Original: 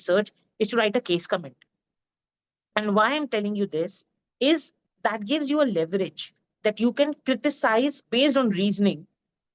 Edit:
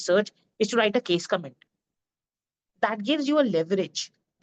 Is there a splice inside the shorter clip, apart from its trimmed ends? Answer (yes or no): yes